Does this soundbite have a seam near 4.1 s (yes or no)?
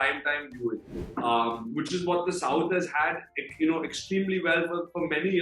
no